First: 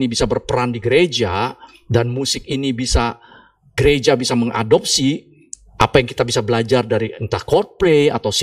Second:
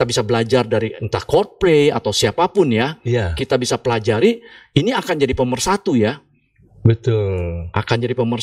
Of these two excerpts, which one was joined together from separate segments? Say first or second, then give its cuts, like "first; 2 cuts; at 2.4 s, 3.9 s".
first; 1 cut; at 3.7 s